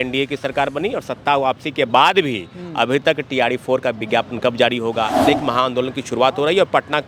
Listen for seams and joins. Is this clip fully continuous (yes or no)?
no